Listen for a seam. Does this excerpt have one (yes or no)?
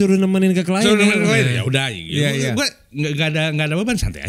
no